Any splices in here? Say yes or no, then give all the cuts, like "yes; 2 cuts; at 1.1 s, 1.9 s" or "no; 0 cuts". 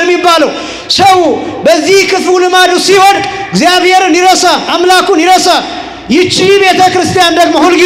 no; 0 cuts